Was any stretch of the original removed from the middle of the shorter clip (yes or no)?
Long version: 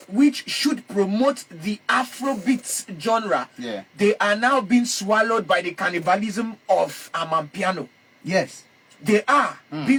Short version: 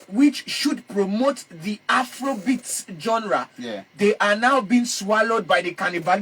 no